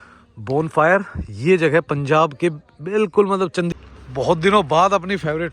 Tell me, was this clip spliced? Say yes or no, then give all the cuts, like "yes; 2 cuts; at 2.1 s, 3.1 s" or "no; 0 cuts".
yes; 1 cut; at 3.7 s